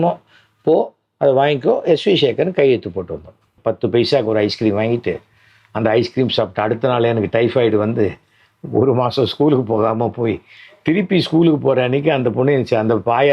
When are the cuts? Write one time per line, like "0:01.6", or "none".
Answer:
0:03.5